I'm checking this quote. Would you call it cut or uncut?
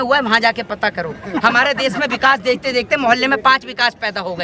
uncut